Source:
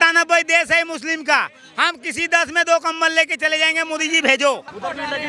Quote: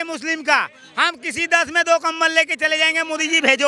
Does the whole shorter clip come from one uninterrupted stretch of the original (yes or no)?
yes